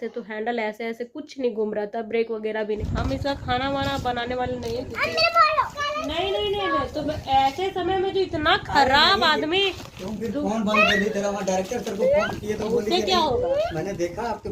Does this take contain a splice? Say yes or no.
yes